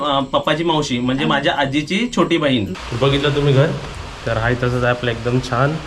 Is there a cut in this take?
yes; 1 cut; at 2.7 s

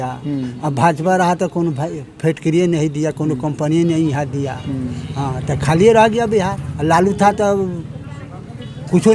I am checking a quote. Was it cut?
yes; 1 cut; at 6.6 s

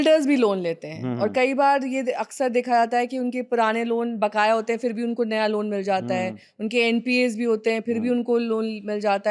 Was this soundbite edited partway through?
no; 0 cuts

